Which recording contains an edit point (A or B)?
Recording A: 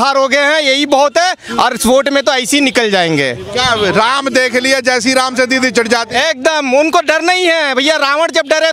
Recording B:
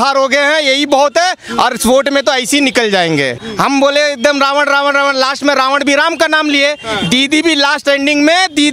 B